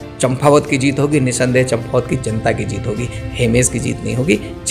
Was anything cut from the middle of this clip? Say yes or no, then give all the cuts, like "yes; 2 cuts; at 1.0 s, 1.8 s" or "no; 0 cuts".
no; 0 cuts